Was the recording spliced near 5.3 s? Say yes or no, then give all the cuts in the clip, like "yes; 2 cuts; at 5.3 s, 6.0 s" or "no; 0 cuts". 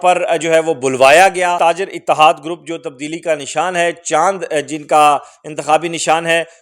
no; 1 cut; at 1.6 s